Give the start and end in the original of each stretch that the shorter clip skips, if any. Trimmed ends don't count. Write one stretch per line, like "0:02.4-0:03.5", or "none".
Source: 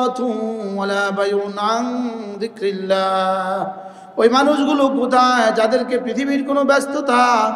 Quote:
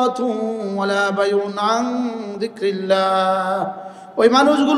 none